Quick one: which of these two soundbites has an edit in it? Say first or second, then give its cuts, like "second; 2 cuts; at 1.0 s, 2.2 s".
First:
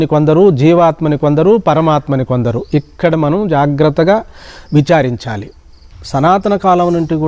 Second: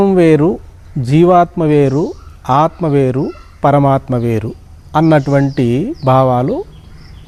first; 1 cut; at 5.9 s